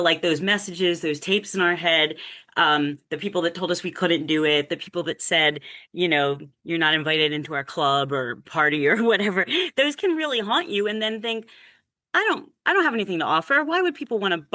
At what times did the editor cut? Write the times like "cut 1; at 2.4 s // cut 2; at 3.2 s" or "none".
none